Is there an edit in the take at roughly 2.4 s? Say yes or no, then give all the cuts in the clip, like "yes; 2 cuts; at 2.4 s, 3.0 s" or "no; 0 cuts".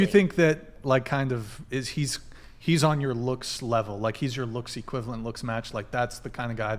no; 0 cuts